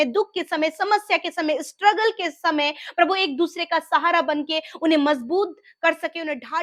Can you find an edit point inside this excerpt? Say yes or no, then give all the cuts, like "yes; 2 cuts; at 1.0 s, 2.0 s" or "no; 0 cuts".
no; 0 cuts